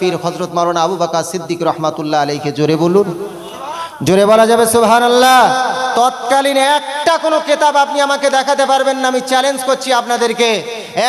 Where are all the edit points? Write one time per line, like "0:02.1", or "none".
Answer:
none